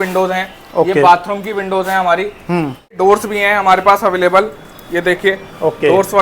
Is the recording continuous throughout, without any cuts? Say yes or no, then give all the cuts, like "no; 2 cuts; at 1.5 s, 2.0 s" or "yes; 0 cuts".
no; 1 cut; at 3.0 s